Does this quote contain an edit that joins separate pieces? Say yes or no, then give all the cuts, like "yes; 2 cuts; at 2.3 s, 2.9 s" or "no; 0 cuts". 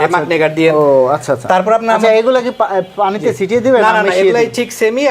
no; 0 cuts